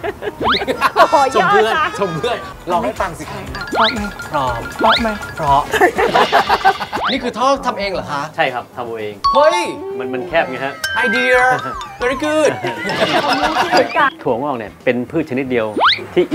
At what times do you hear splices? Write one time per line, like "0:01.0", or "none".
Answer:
0:02.5
0:07.0
0:14.2